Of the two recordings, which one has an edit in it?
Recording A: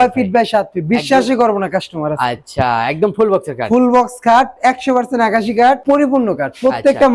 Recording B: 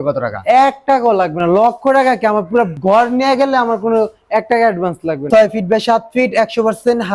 B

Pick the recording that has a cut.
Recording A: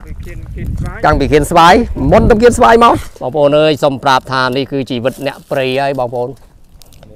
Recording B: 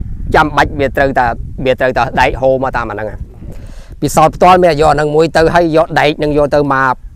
A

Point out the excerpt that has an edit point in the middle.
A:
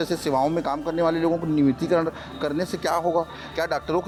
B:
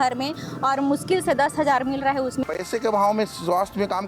B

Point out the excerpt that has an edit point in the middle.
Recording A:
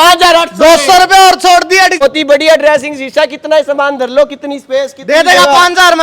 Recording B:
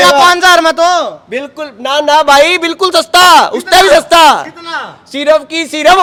A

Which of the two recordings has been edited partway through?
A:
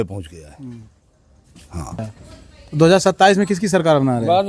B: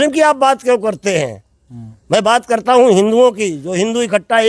A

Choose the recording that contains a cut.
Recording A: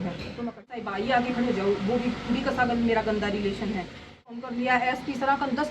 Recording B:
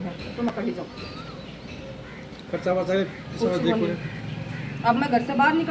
A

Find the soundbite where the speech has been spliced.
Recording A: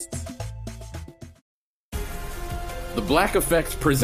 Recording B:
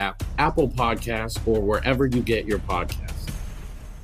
A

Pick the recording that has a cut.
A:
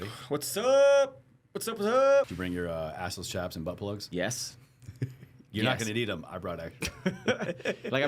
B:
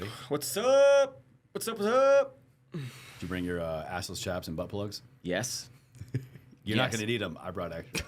A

